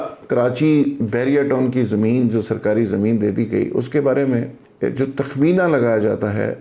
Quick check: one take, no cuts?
no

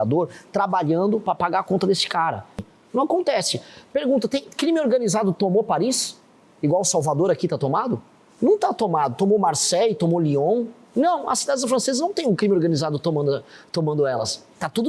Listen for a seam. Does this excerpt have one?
yes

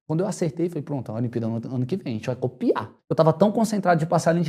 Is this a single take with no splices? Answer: no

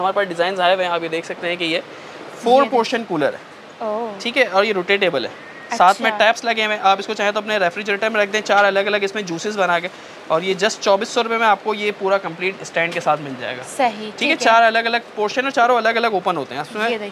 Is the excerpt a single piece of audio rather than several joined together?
yes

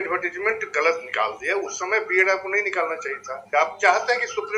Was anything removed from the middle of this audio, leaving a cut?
yes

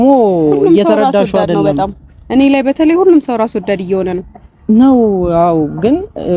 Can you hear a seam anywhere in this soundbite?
no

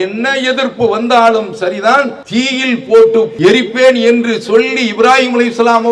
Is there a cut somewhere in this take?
yes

